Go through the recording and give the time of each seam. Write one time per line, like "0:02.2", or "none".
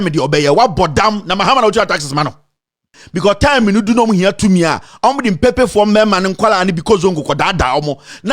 0:03.0